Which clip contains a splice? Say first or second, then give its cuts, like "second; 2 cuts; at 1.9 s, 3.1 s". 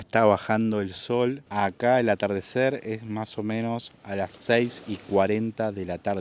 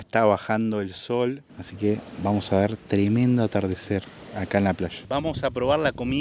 second; 2 cuts; at 1.4 s, 5.0 s